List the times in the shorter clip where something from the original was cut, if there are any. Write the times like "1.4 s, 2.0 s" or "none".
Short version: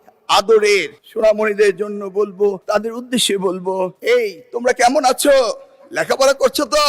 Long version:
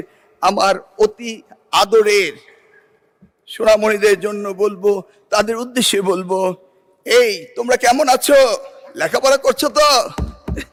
1.0 s, 2.6 s, 4.0 s